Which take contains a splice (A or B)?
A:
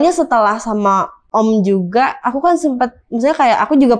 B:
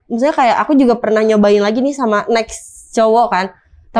A